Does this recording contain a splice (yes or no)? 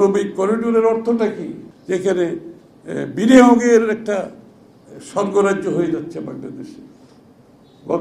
yes